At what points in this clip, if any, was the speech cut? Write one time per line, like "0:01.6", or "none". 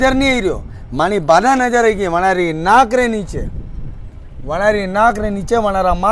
none